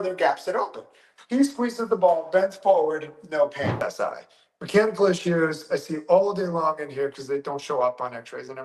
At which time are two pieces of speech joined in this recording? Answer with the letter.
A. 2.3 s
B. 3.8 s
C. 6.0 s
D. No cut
B